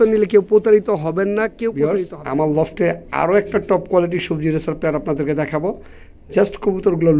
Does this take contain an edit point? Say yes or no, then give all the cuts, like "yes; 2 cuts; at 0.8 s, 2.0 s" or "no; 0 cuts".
yes; 1 cut; at 1.8 s